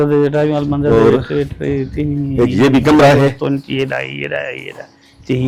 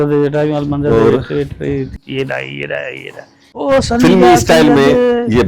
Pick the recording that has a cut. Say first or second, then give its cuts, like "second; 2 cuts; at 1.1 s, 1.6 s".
second; 2 cuts; at 2.0 s, 3.5 s